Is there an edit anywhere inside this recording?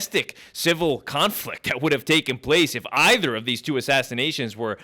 no; 0 cuts

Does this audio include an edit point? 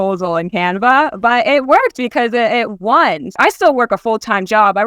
yes; 1 cut; at 3.4 s

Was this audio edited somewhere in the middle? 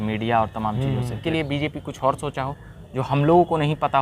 yes; 1 cut; at 1.2 s

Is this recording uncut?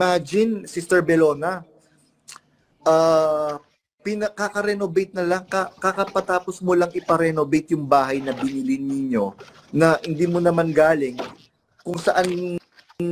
yes; 0 cuts

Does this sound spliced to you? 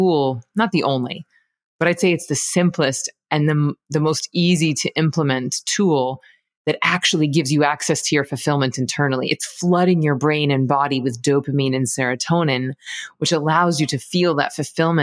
no; 0 cuts

